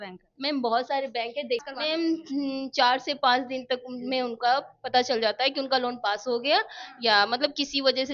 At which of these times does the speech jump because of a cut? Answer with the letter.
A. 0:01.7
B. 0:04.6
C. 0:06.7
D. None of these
A